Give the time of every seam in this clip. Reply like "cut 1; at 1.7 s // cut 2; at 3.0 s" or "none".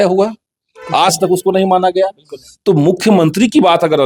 none